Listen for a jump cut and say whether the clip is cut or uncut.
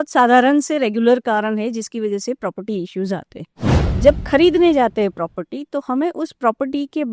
cut